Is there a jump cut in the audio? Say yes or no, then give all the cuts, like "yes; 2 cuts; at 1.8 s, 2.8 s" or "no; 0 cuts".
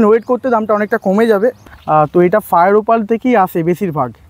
yes; 1 cut; at 1.6 s